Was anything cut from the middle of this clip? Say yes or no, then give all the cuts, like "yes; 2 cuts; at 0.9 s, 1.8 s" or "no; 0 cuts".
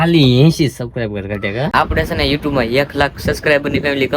yes; 1 cut; at 1.7 s